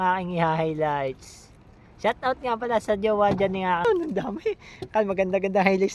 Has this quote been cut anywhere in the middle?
yes; 1 cut; at 3.8 s

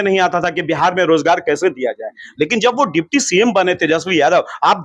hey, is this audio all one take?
yes; 0 cuts

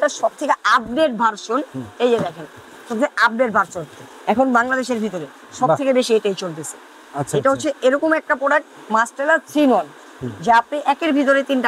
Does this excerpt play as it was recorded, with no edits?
yes; 0 cuts

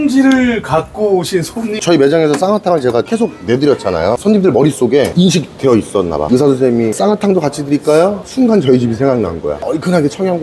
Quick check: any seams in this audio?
yes; 4 cuts; at 1.7 s, 4.2 s, 6.3 s, 9.6 s

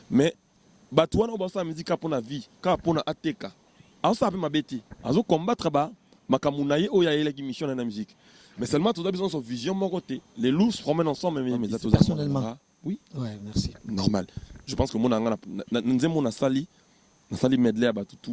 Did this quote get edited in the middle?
yes; 1 cut; at 11.7 s

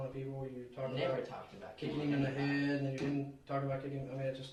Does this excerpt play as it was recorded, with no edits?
yes; 0 cuts

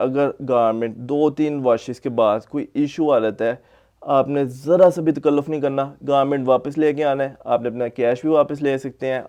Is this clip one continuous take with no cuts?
yes; 0 cuts

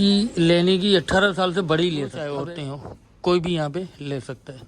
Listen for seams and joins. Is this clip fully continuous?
no; 1 cut; at 2.2 s

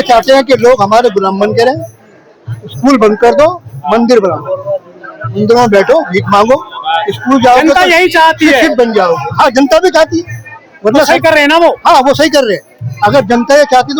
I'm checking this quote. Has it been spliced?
no; 0 cuts

